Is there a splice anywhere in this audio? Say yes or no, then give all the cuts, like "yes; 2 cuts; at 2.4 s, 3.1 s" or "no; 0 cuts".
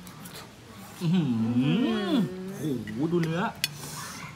yes; 1 cut; at 2.5 s